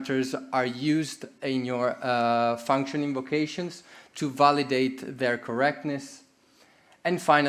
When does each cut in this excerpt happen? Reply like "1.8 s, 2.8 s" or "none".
none